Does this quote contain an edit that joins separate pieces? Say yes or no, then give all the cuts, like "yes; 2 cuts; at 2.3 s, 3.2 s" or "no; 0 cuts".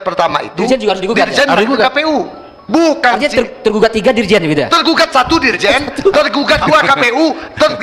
no; 0 cuts